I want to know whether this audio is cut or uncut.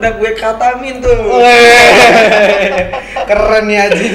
uncut